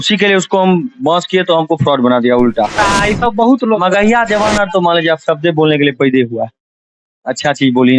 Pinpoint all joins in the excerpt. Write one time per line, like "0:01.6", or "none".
0:02.8